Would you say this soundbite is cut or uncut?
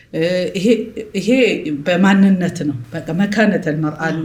uncut